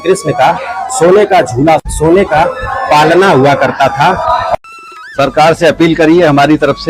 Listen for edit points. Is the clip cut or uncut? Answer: cut